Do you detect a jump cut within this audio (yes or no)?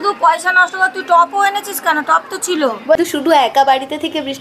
yes